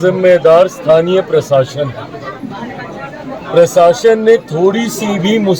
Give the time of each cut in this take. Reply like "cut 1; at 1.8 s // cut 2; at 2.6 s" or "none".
none